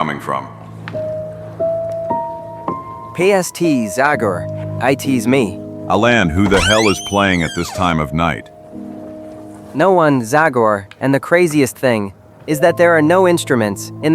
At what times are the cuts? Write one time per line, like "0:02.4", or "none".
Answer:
0:09.6